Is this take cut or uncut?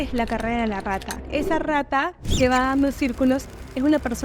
cut